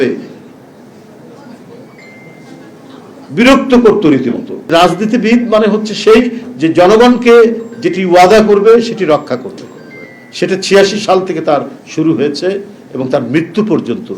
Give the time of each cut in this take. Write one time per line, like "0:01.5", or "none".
0:04.7